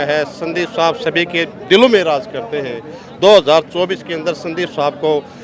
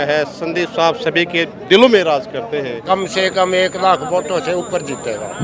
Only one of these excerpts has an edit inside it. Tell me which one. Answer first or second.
second